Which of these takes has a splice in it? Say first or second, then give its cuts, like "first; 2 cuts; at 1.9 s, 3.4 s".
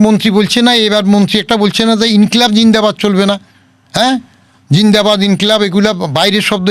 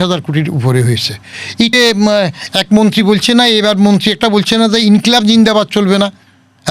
second; 1 cut; at 1.7 s